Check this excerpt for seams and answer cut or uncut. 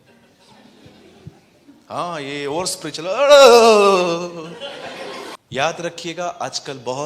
cut